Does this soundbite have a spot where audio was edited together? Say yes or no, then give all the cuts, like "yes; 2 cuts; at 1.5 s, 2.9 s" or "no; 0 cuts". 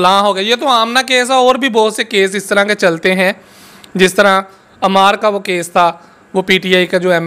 no; 0 cuts